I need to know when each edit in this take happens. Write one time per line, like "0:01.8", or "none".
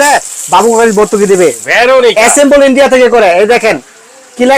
0:01.6